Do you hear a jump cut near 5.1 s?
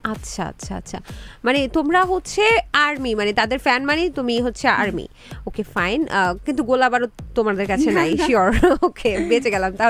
no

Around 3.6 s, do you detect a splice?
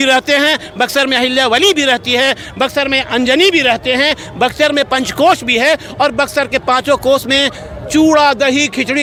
no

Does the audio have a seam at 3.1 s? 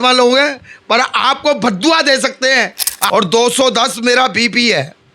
yes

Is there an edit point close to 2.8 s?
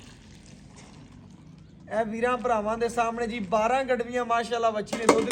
no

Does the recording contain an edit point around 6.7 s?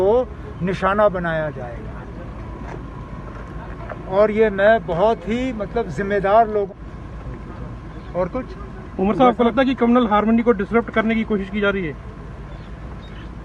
yes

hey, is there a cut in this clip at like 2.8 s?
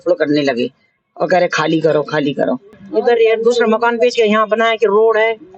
yes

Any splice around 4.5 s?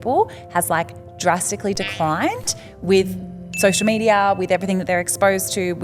no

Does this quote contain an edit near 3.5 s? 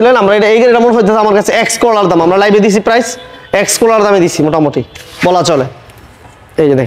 no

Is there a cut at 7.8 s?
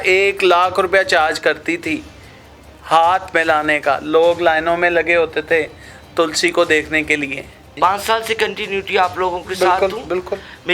yes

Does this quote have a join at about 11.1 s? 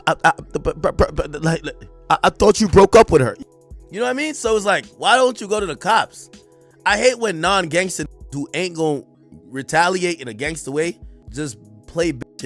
yes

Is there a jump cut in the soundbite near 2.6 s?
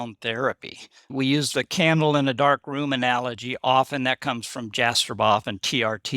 no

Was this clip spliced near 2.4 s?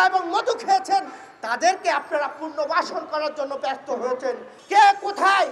no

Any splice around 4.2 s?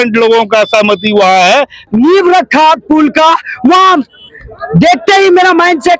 no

